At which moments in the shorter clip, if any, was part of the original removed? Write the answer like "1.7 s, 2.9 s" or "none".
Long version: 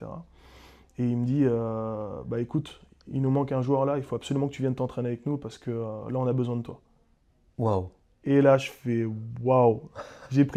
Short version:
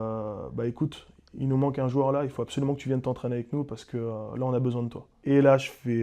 5.1 s